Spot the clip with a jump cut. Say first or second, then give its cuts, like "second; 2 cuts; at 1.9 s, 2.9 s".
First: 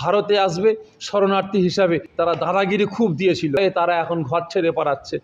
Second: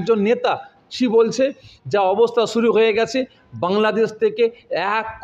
first; 2 cuts; at 2.1 s, 3.6 s